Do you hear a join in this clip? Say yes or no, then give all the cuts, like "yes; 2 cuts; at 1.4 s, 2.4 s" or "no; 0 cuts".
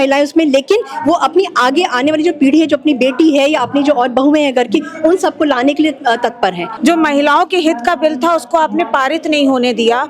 yes; 1 cut; at 6.7 s